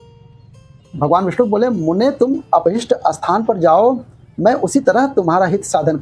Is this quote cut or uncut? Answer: cut